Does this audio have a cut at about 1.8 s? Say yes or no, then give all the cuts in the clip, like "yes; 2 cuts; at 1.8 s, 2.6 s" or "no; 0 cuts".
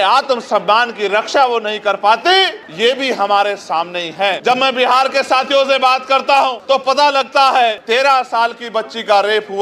no; 1 cut; at 4.4 s